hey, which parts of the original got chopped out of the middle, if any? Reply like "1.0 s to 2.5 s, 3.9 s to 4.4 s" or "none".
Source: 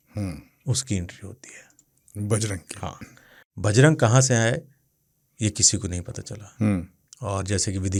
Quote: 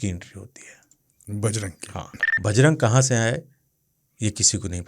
3.1 s to 3.4 s